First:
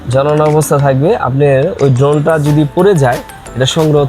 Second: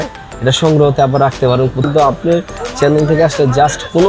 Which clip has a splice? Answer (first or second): second